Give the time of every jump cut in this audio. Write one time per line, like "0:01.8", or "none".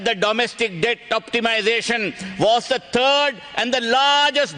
none